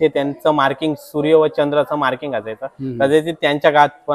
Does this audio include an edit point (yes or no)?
no